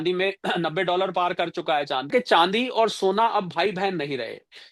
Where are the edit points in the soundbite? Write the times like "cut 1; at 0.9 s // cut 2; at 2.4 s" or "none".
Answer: cut 1; at 2.1 s

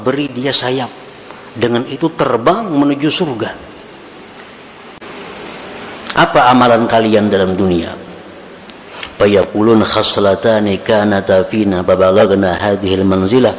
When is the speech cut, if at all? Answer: cut 1; at 5.0 s

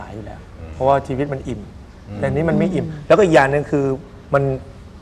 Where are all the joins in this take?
none

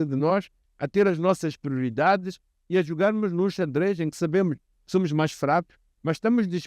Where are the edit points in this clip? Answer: none

